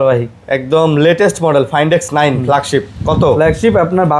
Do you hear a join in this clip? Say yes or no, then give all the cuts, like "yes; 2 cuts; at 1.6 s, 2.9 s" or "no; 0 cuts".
no; 0 cuts